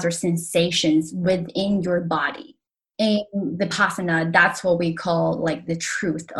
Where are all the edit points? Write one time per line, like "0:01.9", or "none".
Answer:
0:02.8

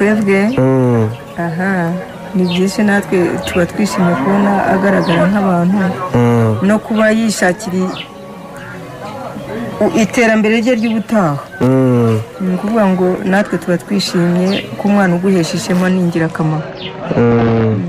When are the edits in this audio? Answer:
0:14.4

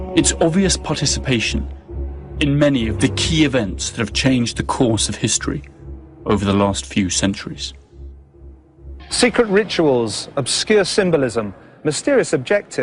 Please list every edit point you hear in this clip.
none

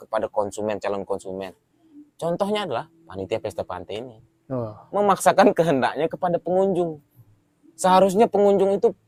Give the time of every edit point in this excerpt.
none

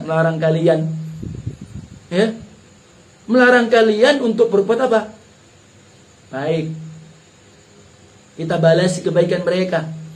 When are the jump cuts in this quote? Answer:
none

